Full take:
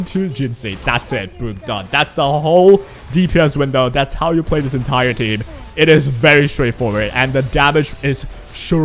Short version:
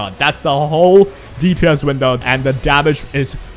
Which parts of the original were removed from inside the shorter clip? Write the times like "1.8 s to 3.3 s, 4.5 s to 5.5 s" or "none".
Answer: 3.9 s to 7.1 s